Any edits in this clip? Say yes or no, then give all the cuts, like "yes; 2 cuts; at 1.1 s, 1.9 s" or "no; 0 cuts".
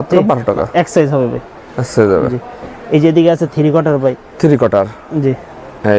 no; 0 cuts